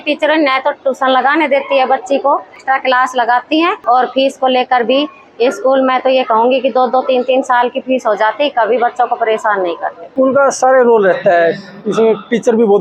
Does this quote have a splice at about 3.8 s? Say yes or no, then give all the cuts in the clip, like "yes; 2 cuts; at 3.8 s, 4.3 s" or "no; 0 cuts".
yes; 3 cuts; at 2.6 s, 3.8 s, 10.1 s